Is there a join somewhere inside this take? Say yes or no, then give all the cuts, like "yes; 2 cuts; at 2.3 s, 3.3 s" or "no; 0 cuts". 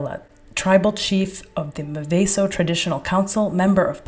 no; 0 cuts